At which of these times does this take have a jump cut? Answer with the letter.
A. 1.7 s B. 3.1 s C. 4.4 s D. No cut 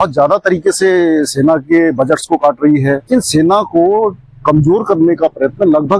B